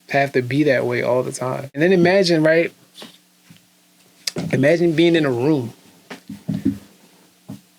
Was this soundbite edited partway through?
yes; 1 cut; at 1.6 s

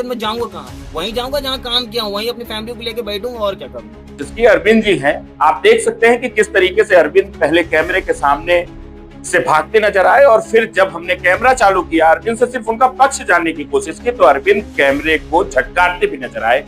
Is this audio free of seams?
no; 1 cut; at 4.3 s

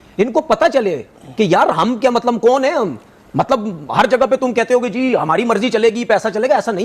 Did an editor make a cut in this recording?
no; 0 cuts

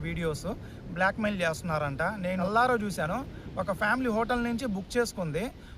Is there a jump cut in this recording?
yes; 1 cut; at 2.4 s

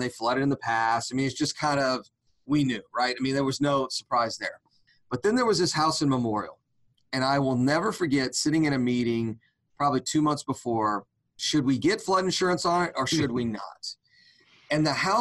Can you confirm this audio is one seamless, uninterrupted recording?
yes; 0 cuts

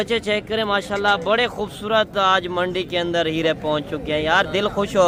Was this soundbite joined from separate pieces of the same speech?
no; 0 cuts

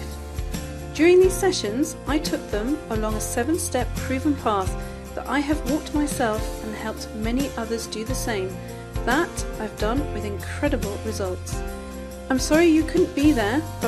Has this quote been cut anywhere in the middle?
yes; 1 cut; at 9.9 s

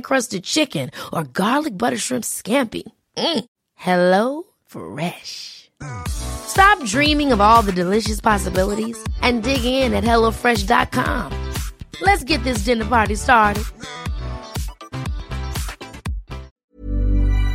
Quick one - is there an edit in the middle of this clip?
yes; 1 cut; at 16.6 s

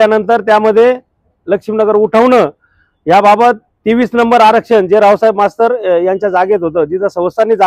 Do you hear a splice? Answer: no; 0 cuts

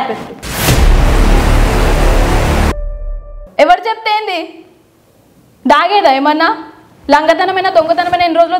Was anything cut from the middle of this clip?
yes; 1 cut; at 3.4 s

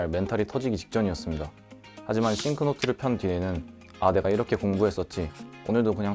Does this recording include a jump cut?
no; 0 cuts

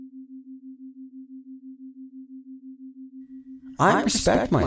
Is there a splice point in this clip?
no; 0 cuts

